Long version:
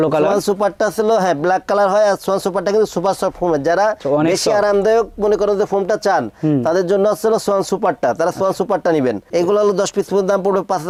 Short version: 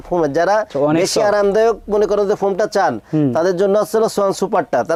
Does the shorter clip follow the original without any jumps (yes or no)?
yes